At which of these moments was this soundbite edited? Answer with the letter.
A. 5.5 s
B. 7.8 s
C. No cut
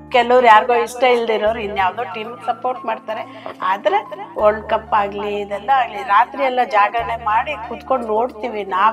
C